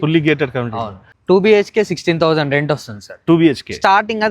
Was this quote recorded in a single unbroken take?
no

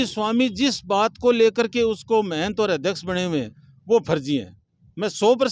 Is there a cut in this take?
no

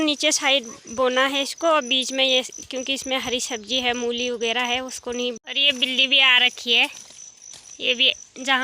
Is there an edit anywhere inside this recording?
yes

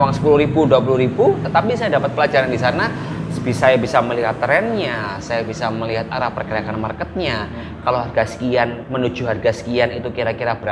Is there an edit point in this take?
no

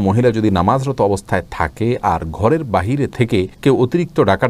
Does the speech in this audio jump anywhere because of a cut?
no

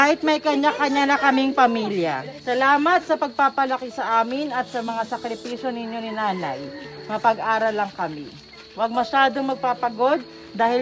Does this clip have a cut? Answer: yes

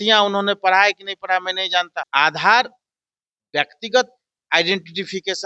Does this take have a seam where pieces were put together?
yes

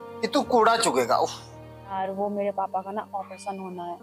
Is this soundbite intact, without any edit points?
no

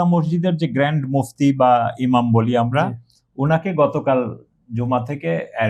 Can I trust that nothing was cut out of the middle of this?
yes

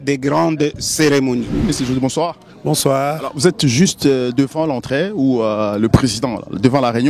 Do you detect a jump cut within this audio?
no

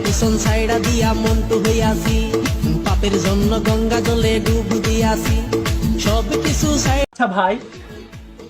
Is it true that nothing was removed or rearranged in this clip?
no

